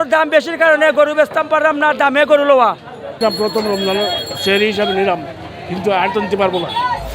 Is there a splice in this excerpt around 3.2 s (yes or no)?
yes